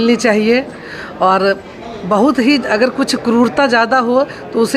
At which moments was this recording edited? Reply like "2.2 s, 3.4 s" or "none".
none